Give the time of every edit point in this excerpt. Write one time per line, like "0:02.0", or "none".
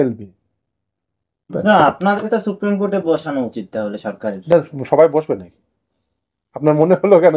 0:01.5